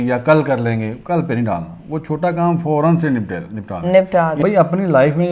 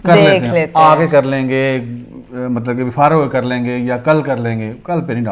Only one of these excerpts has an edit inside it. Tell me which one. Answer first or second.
first